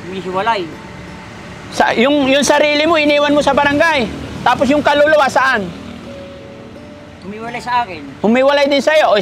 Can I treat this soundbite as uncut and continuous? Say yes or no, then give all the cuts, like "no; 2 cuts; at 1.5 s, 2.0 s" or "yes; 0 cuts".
yes; 0 cuts